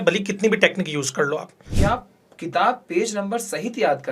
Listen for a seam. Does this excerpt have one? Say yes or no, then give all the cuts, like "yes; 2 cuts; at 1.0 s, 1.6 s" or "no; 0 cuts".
yes; 1 cut; at 1.6 s